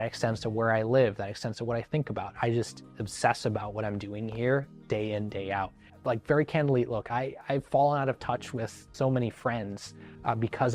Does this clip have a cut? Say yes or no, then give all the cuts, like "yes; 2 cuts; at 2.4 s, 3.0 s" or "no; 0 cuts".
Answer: yes; 2 cuts; at 5.9 s, 8.8 s